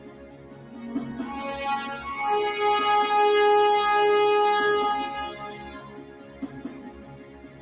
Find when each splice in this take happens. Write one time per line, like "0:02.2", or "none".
0:06.7